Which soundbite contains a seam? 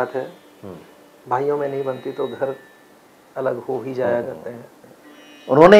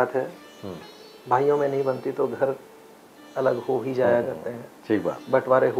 first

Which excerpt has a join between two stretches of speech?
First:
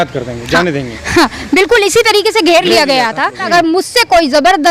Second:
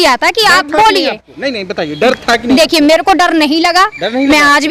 first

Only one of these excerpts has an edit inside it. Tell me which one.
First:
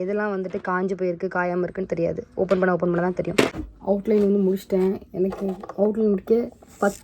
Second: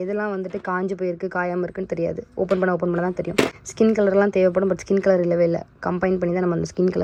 first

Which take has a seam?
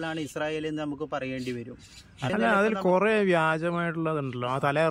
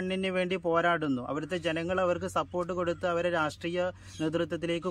first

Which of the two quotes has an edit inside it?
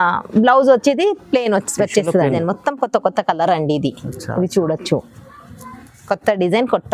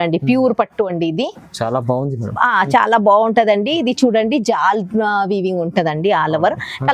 first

